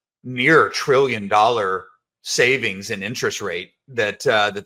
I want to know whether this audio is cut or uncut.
uncut